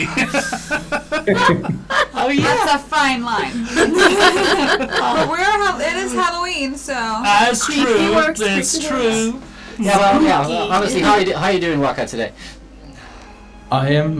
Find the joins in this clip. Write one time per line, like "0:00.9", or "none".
none